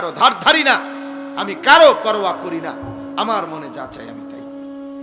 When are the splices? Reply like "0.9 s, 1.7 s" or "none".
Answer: 3.9 s